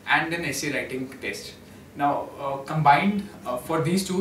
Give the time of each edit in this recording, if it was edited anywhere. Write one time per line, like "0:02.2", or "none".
none